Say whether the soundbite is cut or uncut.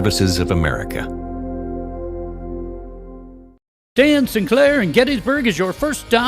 cut